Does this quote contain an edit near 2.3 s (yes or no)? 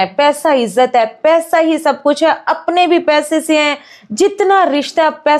no